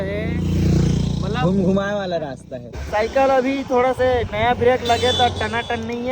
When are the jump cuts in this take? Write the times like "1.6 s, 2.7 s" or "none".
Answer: 2.8 s